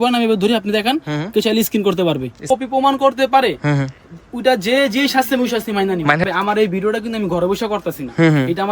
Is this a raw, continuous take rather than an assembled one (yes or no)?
no